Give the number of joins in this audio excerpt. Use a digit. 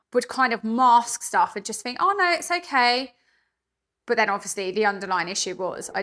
0